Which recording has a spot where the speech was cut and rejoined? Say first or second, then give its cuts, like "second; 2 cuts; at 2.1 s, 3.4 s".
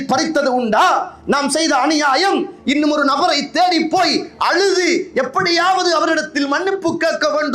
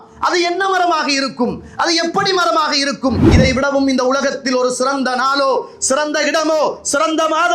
second; 1 cut; at 3.3 s